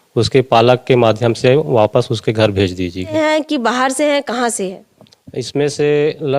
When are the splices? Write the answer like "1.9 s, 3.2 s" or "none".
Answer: 3.1 s